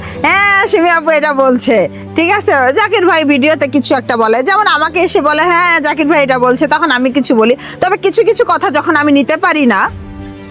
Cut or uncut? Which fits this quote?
uncut